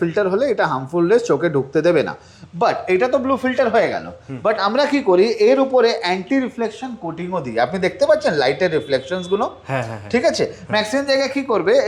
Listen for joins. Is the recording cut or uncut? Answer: uncut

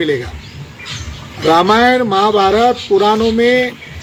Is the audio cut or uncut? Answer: uncut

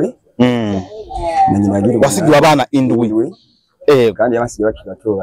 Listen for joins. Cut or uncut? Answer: uncut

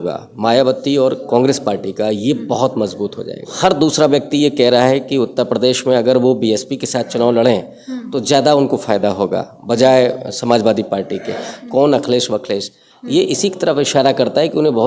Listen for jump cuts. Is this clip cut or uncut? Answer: cut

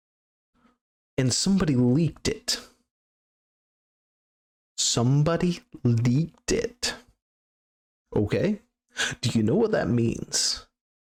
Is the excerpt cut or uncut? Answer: uncut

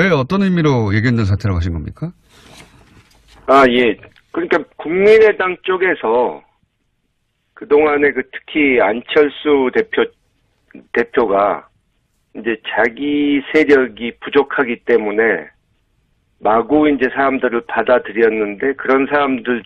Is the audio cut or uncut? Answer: cut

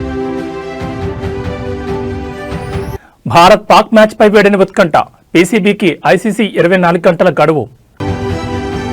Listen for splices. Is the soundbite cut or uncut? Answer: cut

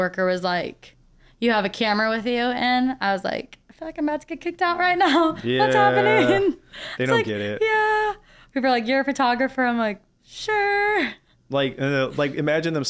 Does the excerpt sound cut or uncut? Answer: uncut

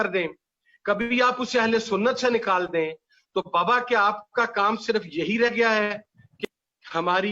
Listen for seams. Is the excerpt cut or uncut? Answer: cut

